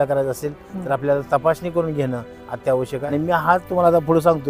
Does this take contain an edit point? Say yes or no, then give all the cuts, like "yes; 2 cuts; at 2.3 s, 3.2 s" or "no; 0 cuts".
yes; 1 cut; at 3.0 s